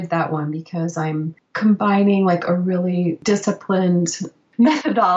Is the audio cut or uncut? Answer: cut